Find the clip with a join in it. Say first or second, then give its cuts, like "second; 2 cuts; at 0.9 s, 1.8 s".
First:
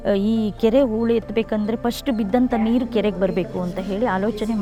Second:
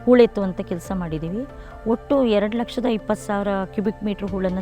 second; 1 cut; at 1.6 s